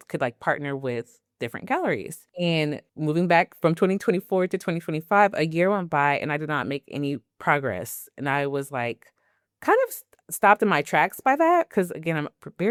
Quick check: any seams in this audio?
no; 0 cuts

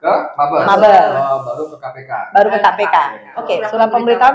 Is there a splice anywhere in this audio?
yes; 1 cut; at 3.4 s

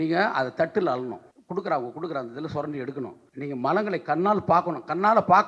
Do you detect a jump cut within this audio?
yes; 2 cuts; at 1.3 s, 3.2 s

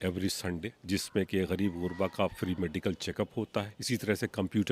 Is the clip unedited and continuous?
no; 1 cut; at 3.8 s

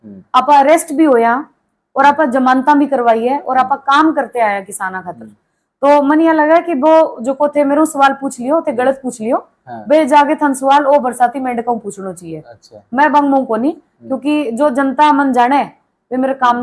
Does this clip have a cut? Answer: no; 0 cuts

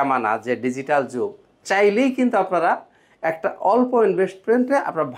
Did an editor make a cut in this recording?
no; 0 cuts

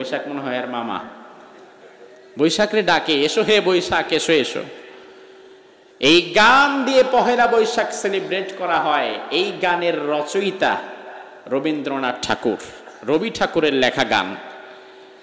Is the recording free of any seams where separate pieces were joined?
yes; 0 cuts

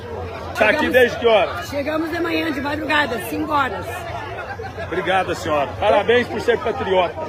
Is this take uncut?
yes; 0 cuts

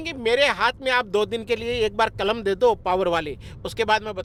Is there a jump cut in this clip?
no; 0 cuts

